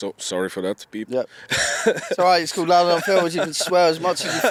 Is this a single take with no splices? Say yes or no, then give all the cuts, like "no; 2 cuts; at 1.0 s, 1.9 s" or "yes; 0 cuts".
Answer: yes; 0 cuts